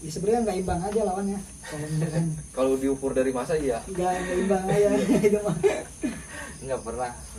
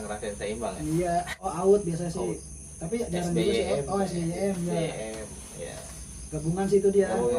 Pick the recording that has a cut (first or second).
second